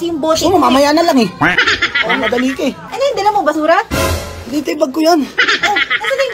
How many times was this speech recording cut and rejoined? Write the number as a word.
one